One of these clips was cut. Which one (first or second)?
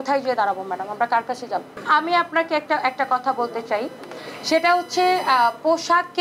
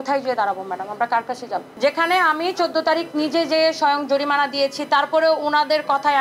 second